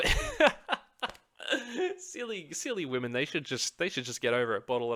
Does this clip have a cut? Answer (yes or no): no